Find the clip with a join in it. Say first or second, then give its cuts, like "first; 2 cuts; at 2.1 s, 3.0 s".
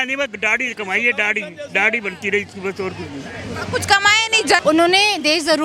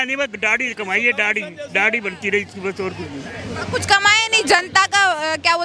first; 1 cut; at 4.6 s